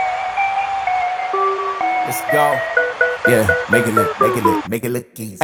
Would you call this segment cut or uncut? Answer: uncut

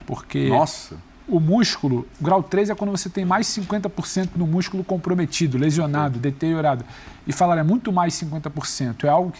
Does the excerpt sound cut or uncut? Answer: uncut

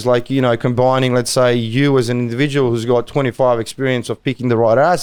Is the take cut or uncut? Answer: uncut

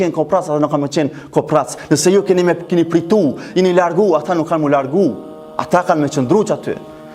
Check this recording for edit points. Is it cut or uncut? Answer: uncut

